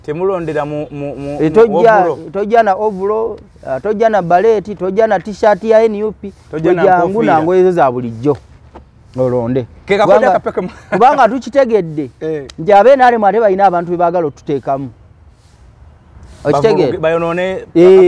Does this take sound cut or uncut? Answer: uncut